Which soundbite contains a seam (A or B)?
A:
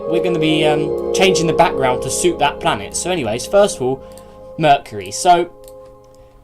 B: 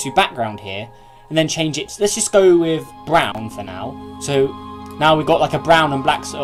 A